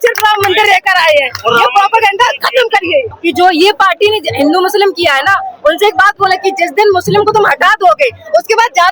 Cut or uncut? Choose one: cut